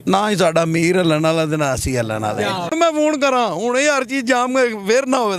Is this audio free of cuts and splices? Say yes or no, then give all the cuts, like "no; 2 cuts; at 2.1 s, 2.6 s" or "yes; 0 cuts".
no; 1 cut; at 2.7 s